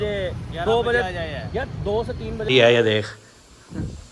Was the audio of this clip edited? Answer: yes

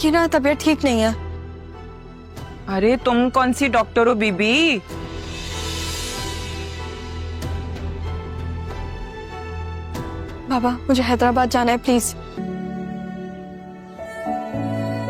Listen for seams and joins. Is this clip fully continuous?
yes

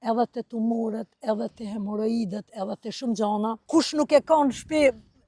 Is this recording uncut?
no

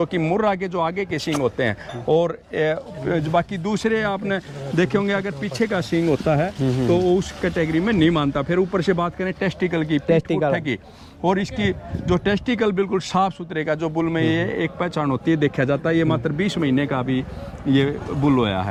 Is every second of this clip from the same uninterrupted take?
yes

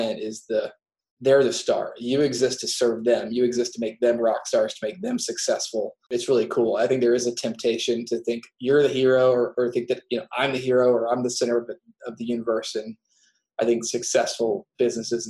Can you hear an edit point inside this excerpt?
yes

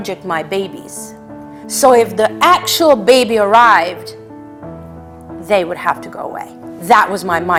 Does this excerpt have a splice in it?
no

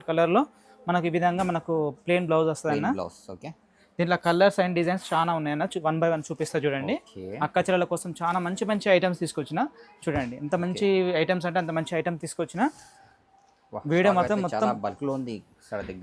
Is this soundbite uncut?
yes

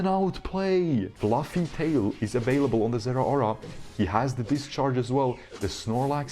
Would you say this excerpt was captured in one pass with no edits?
no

